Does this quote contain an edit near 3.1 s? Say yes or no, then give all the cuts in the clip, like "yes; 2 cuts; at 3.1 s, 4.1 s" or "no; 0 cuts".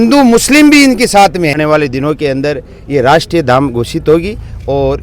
no; 1 cut; at 1.6 s